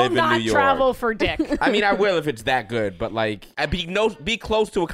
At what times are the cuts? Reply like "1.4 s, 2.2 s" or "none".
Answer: 3.5 s